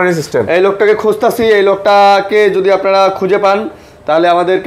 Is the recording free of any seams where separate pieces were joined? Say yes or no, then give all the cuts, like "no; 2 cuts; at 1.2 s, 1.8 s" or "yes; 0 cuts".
yes; 0 cuts